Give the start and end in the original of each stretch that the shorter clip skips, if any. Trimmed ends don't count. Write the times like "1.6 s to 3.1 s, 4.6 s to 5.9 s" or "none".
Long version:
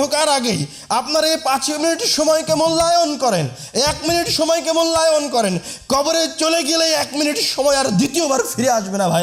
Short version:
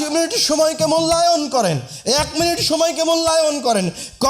none